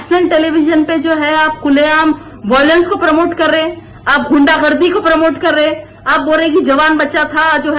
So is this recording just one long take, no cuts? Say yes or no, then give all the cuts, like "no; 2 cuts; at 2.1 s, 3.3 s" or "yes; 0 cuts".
yes; 0 cuts